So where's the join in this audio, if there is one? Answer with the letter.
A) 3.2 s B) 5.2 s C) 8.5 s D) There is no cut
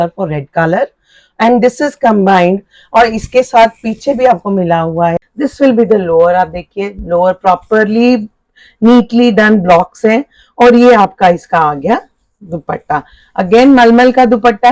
B